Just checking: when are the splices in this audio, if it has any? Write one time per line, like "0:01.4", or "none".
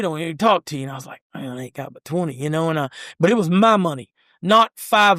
none